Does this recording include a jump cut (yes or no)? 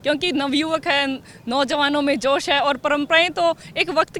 no